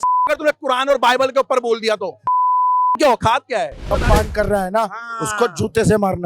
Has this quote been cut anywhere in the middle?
yes; 1 cut; at 3.9 s

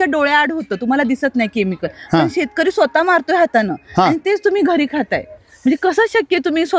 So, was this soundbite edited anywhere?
no; 0 cuts

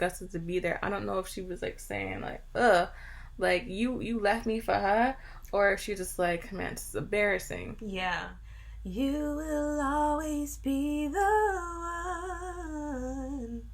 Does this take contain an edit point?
yes; 1 cut; at 8.3 s

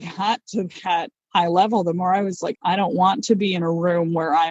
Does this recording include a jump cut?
yes; 2 cuts; at 1.2 s, 2.5 s

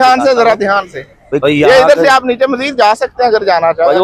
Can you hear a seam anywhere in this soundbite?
yes; 1 cut; at 1.4 s

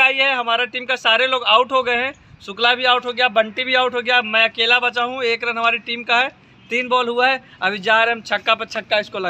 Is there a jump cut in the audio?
no; 0 cuts

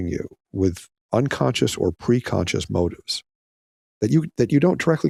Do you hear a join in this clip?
no; 0 cuts

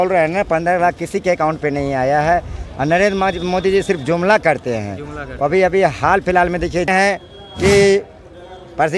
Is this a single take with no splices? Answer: no; 1 cut; at 6.9 s

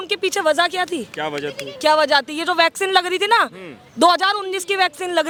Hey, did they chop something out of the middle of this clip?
no; 0 cuts

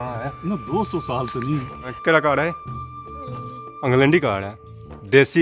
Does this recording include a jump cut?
yes; 1 cut; at 2.0 s

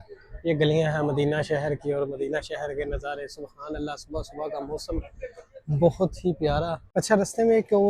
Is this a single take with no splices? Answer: no; 1 cut; at 6.8 s

